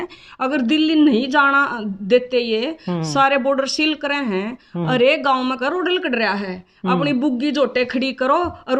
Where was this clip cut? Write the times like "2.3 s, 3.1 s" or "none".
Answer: none